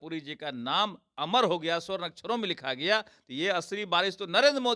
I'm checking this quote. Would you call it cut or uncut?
uncut